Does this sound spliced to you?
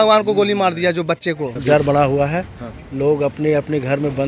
yes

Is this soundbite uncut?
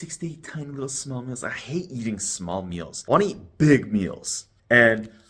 yes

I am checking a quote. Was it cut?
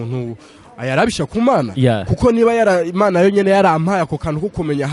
no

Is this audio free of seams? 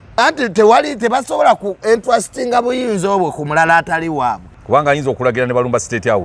no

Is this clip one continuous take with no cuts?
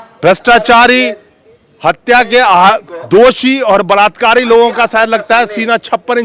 yes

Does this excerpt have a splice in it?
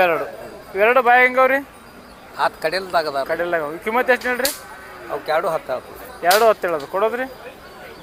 no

